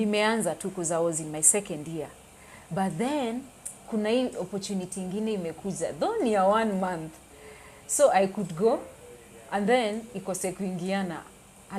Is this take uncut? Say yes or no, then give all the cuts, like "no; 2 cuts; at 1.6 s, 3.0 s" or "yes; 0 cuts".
yes; 0 cuts